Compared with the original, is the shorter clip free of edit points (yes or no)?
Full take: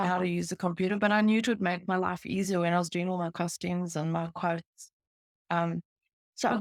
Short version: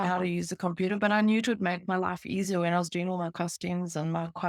yes